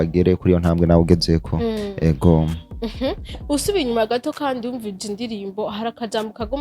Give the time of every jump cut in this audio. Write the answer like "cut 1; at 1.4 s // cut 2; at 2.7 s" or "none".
none